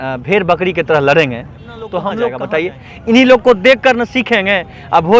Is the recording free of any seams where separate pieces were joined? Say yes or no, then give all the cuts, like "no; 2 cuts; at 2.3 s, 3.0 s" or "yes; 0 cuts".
no; 1 cut; at 2.4 s